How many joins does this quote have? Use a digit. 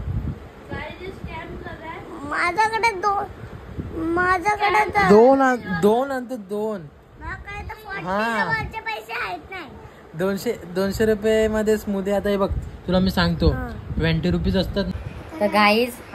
1